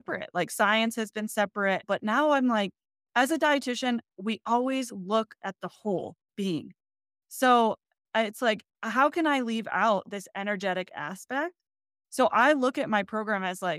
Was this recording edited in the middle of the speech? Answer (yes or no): no